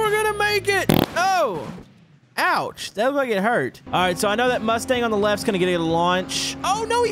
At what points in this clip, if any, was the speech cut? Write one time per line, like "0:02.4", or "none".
0:03.8